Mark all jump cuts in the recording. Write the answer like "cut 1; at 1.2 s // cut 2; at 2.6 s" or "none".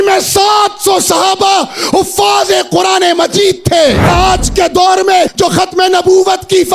cut 1; at 4.1 s // cut 2; at 5.3 s